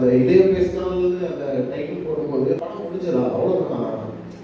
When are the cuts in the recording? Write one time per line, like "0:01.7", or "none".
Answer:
0:02.6